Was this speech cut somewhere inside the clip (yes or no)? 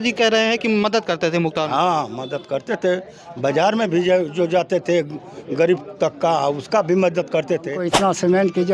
yes